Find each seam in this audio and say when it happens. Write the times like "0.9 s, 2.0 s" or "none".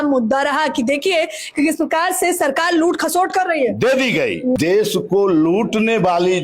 4.6 s

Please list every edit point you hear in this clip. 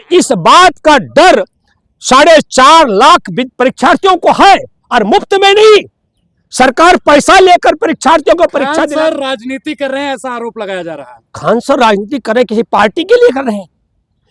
8.8 s

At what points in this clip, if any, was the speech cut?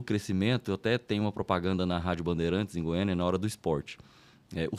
none

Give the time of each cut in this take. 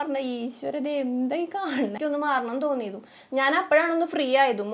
2.0 s

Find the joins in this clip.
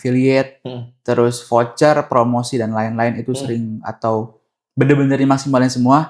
none

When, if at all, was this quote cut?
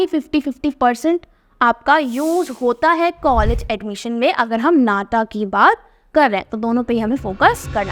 none

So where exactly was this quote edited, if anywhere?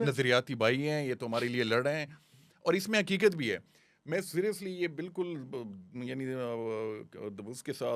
none

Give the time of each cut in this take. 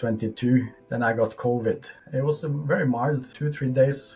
none

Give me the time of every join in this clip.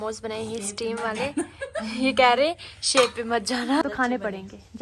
3.8 s

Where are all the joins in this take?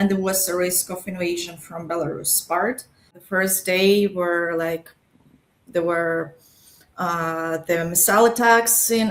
3.2 s

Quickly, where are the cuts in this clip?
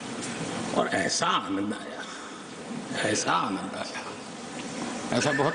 none

